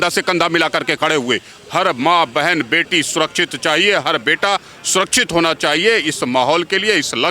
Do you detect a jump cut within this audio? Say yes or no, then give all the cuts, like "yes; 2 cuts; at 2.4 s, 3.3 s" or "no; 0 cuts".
yes; 1 cut; at 1.5 s